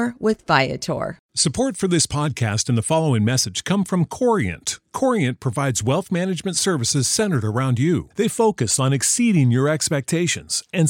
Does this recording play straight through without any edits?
no; 1 cut; at 1.2 s

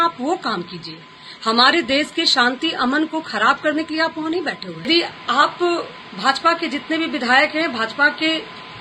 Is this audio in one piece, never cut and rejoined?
no; 1 cut; at 4.9 s

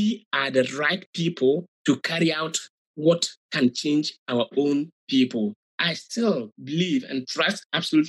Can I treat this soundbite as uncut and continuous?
no; 1 cut; at 5.7 s

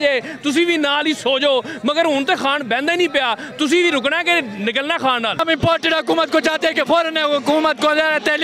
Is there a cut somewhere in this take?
yes; 1 cut; at 5.4 s

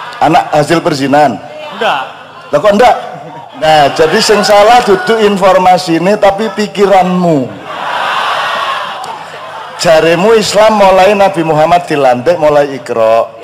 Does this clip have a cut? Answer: yes; 2 cuts; at 3.6 s, 8.9 s

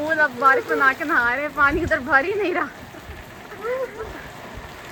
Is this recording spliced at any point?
no; 0 cuts

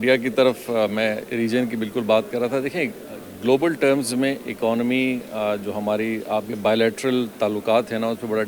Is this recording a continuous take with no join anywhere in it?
yes; 0 cuts

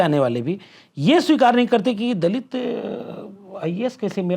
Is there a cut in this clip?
no; 0 cuts

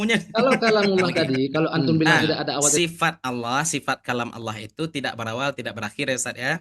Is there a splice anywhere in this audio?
yes; 1 cut; at 2.8 s

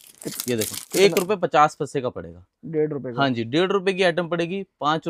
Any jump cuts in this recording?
no; 0 cuts

